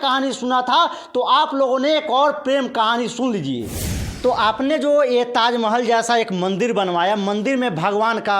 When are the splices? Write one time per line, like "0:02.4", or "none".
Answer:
0:04.0